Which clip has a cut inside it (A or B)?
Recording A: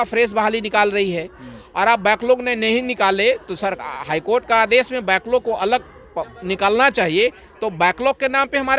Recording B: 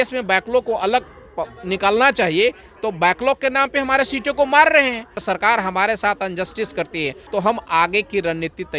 B